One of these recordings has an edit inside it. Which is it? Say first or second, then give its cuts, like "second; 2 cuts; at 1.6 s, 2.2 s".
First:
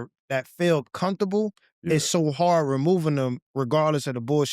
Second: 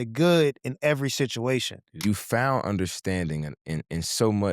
second; 1 cut; at 1.8 s